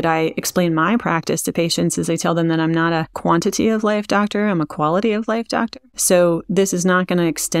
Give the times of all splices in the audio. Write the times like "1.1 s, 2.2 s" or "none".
5.9 s